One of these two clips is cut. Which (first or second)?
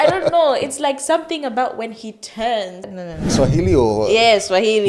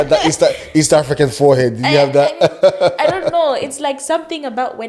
first